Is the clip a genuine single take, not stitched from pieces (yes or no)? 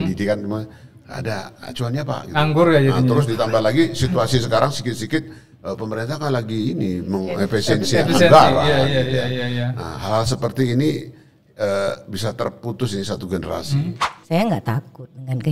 no